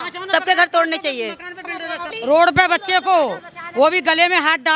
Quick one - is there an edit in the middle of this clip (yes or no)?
yes